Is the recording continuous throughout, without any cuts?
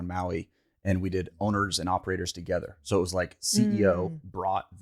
yes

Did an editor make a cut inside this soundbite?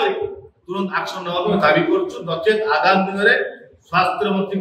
no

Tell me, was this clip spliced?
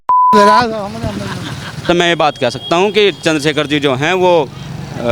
yes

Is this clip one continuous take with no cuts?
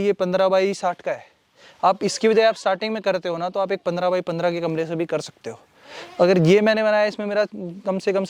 yes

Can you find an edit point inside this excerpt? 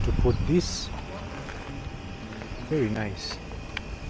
no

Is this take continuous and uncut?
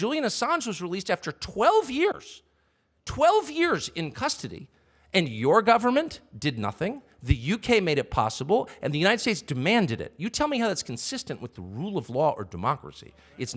yes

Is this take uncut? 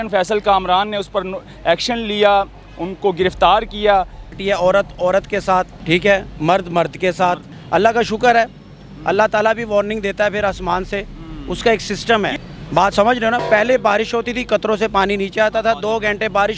no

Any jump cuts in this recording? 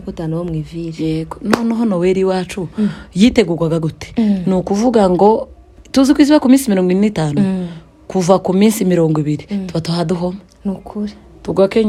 no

